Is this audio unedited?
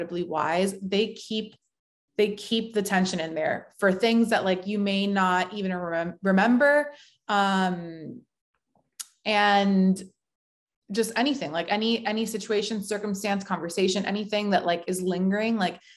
yes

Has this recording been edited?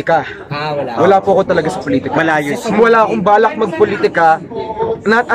no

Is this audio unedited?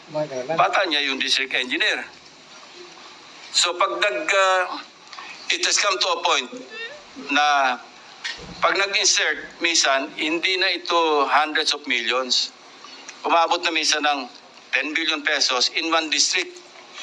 yes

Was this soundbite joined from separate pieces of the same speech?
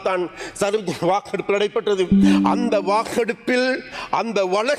no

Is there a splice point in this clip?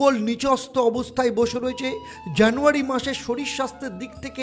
no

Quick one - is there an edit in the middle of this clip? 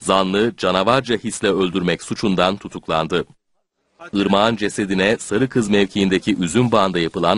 no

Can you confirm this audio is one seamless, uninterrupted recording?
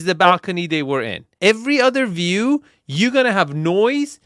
no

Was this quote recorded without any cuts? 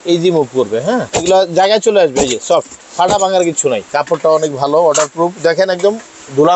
no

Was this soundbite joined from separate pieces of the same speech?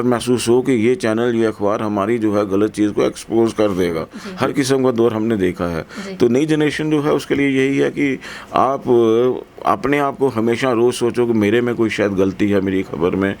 yes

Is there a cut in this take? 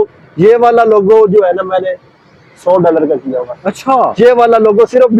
no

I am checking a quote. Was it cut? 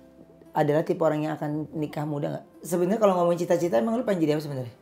yes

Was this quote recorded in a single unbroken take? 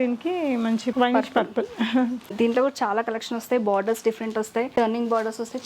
no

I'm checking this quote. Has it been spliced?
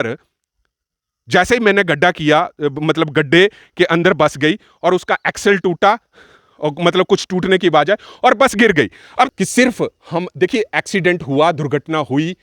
yes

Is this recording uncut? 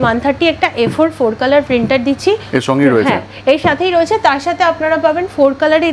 yes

